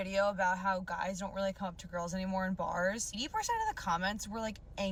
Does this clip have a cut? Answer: no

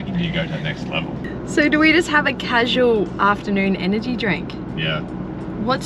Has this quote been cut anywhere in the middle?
yes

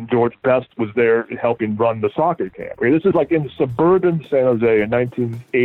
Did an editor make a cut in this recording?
no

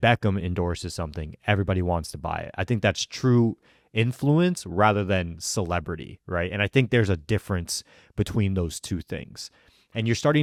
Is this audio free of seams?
yes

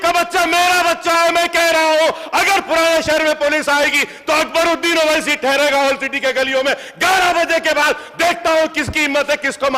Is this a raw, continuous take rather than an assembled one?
yes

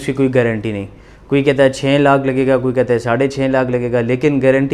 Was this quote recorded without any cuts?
yes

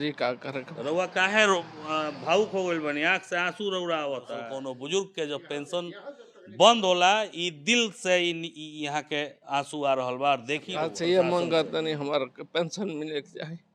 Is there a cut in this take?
yes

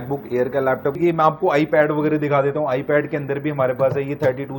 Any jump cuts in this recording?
yes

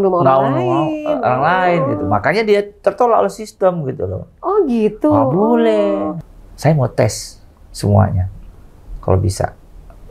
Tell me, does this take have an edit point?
yes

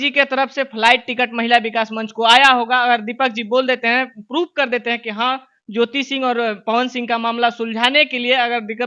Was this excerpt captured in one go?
yes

